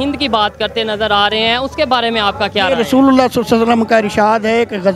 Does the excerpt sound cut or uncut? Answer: uncut